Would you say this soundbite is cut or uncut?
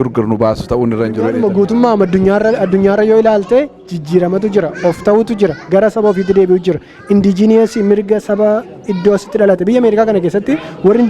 cut